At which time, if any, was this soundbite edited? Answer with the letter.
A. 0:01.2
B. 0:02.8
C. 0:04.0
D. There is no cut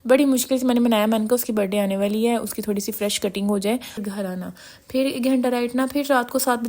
C